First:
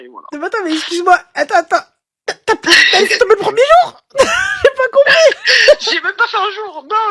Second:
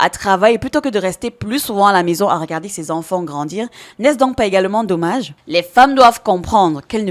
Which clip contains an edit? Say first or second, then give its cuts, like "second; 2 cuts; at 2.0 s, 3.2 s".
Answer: second; 1 cut; at 5.4 s